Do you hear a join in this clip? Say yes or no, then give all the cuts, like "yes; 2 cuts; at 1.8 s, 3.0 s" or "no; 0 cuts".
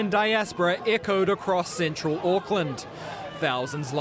no; 0 cuts